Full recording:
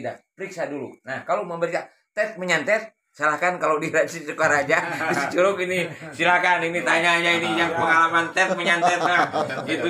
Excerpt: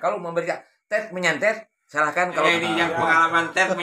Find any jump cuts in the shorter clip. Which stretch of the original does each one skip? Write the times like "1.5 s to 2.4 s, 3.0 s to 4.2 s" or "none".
3.8 s to 7.3 s